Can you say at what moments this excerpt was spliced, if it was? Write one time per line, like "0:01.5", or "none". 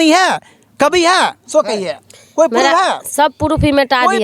none